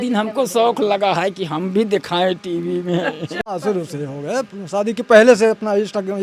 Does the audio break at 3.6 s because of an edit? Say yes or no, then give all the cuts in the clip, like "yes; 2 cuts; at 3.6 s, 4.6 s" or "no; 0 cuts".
yes; 1 cut; at 3.6 s